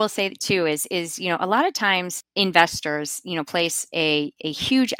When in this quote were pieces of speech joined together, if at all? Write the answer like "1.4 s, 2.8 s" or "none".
none